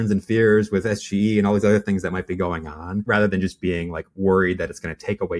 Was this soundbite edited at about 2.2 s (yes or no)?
no